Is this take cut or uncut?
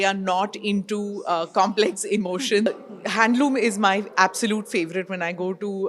cut